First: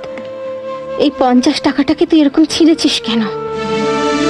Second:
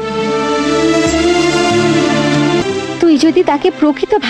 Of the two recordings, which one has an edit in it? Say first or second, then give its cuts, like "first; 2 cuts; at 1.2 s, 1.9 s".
second; 1 cut; at 2.6 s